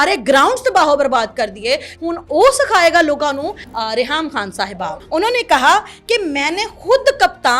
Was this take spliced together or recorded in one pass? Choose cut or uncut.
cut